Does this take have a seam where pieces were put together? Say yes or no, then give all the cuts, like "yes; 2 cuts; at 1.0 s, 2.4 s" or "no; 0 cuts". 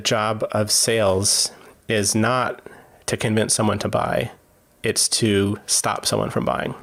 no; 0 cuts